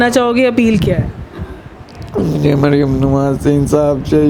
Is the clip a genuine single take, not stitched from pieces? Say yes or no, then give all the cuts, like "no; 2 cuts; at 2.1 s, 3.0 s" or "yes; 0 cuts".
yes; 0 cuts